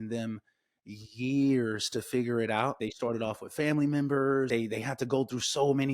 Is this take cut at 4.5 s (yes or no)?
yes